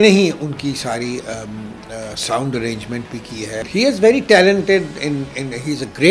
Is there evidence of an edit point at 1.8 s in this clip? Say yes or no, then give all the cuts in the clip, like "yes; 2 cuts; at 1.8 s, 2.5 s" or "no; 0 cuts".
no; 1 cut; at 3.6 s